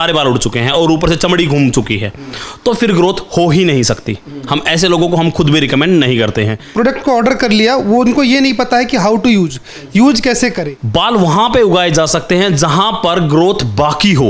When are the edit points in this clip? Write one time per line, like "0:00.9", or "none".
0:06.6
0:10.6